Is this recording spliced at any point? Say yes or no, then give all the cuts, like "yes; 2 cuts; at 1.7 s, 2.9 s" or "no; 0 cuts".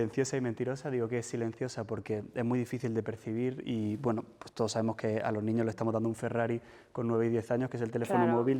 no; 0 cuts